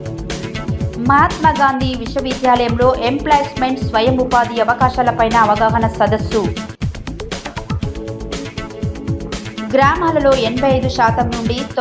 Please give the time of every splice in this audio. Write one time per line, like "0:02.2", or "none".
0:00.9